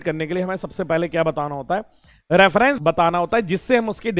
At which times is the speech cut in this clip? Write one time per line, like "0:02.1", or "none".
0:02.8